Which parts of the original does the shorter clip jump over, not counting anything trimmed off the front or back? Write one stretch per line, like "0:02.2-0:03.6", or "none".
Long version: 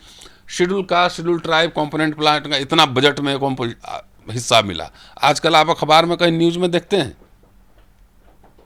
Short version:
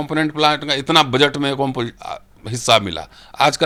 none